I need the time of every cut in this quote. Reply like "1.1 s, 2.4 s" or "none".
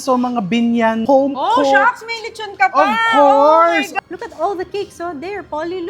1.0 s, 3.9 s